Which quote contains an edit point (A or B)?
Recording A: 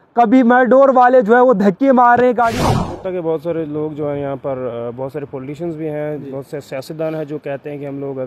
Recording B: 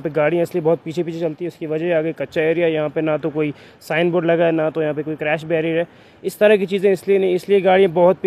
A